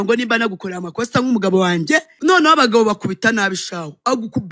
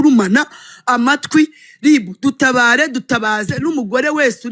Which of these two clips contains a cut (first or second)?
first